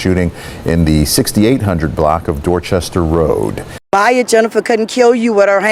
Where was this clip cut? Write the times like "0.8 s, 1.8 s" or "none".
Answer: 3.7 s